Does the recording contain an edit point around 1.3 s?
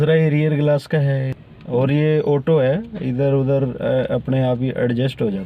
yes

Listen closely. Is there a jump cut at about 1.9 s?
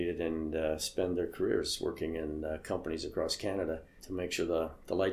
no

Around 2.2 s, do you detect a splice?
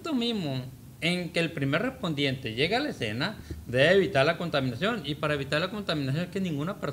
no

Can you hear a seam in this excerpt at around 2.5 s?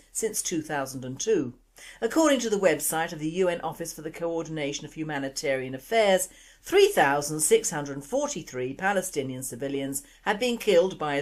no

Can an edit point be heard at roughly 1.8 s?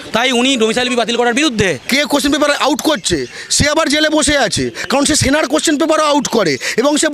yes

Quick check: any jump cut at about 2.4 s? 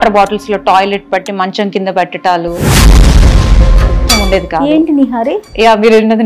no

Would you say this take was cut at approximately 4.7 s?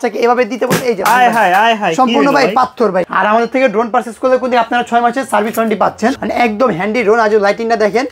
no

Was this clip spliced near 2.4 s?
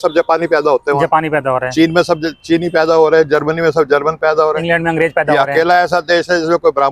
no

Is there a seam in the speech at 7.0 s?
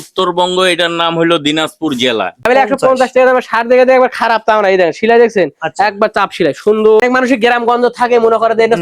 yes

